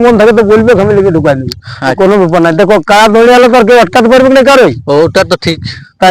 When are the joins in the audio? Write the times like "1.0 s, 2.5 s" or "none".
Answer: 1.9 s